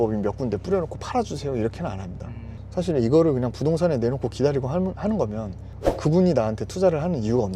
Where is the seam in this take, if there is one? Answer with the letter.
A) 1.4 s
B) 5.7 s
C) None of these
C